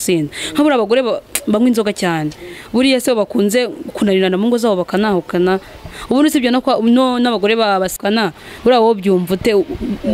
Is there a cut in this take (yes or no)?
no